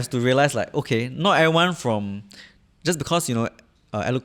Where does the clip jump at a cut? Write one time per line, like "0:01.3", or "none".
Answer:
none